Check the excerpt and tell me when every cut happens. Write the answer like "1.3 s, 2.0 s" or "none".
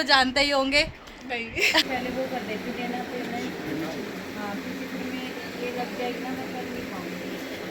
1.8 s